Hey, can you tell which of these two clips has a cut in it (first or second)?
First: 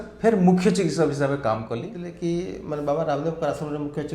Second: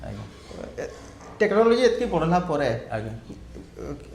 first